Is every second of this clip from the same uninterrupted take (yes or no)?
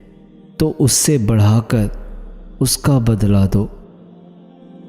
no